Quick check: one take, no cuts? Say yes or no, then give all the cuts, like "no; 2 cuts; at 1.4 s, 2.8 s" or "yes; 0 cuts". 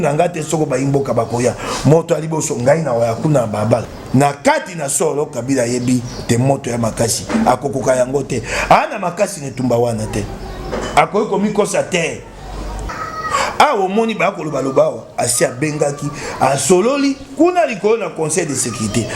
no; 2 cuts; at 3.9 s, 12.9 s